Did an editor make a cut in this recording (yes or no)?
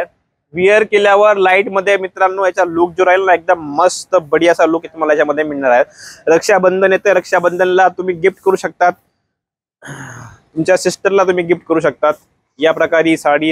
no